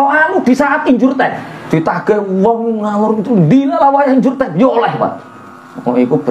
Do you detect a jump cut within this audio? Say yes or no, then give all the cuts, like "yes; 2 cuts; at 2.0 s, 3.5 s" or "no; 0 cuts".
yes; 1 cut; at 1.5 s